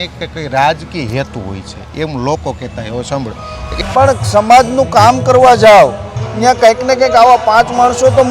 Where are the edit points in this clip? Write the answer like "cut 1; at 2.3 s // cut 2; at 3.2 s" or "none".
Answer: cut 1; at 3.7 s